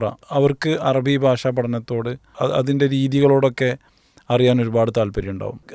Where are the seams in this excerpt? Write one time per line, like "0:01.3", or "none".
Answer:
none